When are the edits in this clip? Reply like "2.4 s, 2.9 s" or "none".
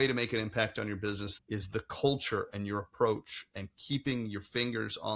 1.3 s